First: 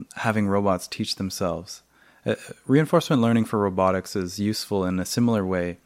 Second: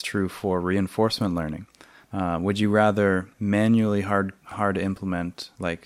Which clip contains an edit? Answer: second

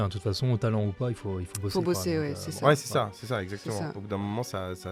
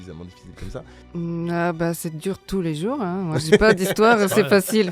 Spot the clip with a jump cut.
second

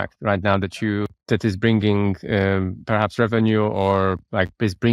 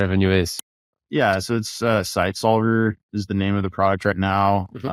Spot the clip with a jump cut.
first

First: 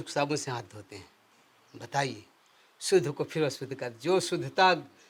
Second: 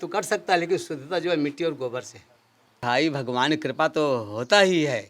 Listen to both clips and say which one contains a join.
second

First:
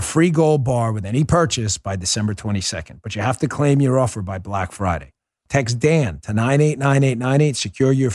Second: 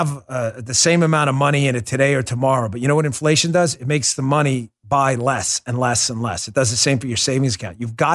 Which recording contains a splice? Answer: first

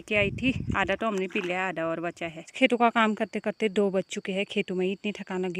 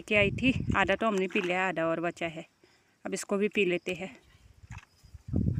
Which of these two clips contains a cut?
first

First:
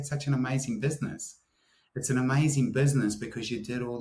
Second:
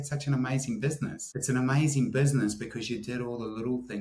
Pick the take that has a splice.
second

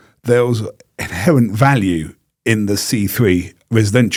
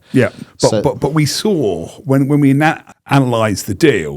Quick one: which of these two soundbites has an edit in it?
second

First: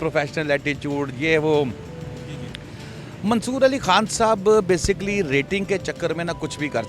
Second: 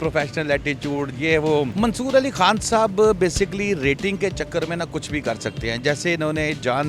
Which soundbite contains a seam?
second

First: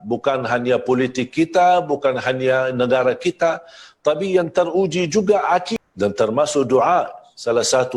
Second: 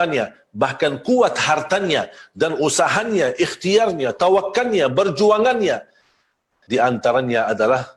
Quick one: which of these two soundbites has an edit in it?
first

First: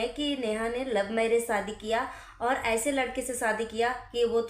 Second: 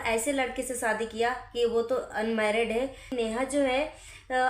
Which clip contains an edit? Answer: second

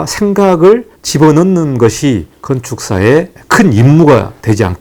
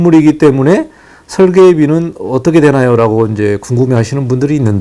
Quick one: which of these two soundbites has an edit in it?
first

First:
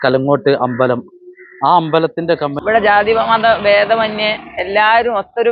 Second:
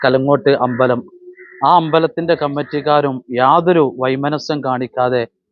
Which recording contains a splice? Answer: first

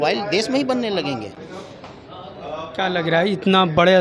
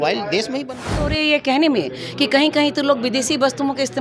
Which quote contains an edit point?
second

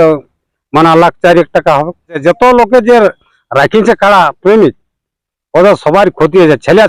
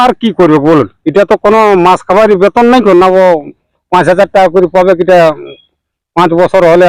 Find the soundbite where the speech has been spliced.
first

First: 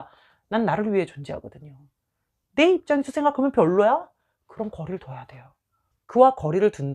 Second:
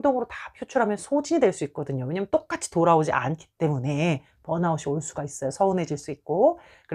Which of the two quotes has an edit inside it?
first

